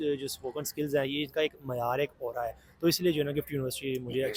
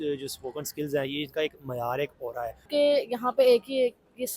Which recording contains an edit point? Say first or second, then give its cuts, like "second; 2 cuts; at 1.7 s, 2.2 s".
second; 1 cut; at 2.6 s